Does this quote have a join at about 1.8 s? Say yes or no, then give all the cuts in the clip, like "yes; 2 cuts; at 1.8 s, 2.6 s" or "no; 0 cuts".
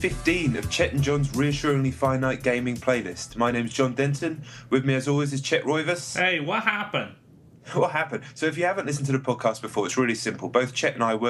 no; 0 cuts